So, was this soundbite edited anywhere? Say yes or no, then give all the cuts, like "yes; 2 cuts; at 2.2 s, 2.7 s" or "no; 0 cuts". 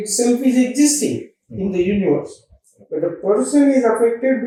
no; 0 cuts